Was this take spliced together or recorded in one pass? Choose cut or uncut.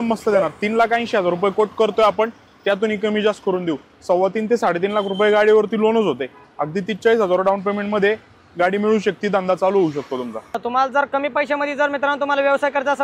uncut